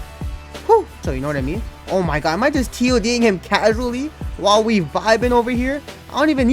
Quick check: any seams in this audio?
yes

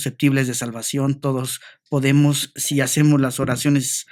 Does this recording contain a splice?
no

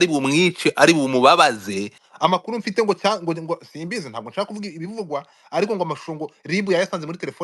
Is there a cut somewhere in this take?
yes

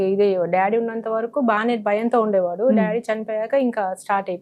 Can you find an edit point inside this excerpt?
no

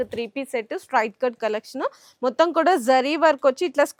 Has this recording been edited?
no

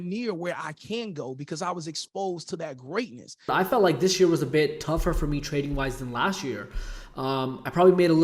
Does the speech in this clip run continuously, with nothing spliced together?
no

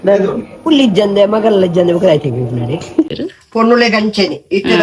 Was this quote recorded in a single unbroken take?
no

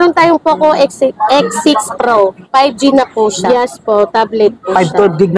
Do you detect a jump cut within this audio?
yes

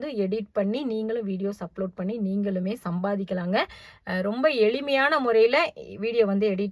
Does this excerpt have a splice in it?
no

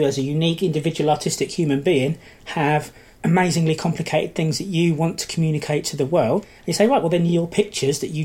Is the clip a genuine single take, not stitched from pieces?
no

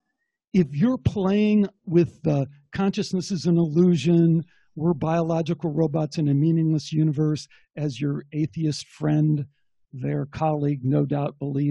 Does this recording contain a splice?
no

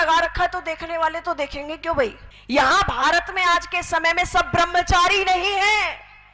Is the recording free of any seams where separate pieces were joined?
no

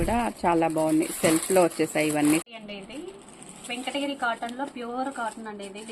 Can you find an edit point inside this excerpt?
yes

